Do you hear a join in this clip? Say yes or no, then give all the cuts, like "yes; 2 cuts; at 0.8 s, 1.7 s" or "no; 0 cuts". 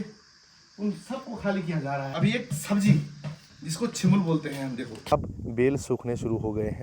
yes; 2 cuts; at 2.1 s, 5.0 s